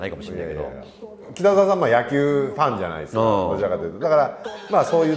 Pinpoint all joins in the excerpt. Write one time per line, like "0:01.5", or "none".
0:01.2